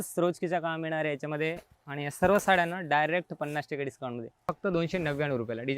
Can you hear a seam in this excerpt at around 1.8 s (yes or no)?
no